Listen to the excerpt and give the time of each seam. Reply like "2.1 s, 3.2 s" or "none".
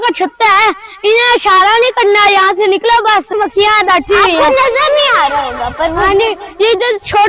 3.3 s